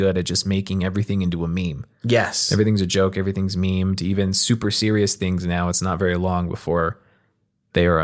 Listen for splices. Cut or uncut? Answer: uncut